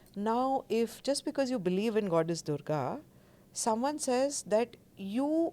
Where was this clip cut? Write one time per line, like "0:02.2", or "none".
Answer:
none